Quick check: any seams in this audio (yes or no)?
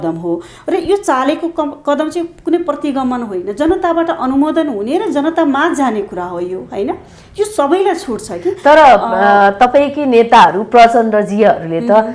no